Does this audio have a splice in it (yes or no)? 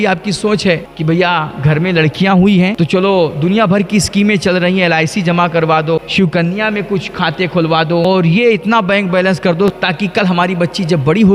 yes